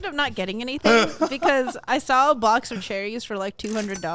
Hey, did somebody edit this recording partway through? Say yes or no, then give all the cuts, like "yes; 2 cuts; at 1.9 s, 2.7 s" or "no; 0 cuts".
no; 0 cuts